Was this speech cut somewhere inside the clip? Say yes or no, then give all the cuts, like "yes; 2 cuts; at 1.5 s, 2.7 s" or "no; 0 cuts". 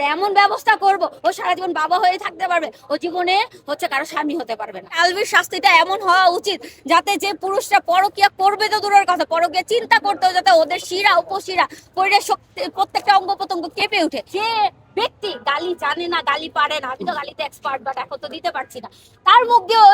yes; 2 cuts; at 5.0 s, 14.2 s